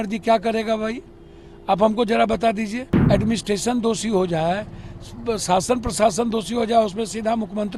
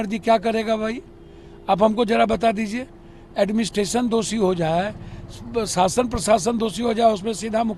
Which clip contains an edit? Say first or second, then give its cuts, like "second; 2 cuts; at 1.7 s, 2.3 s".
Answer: first; 1 cut; at 2.9 s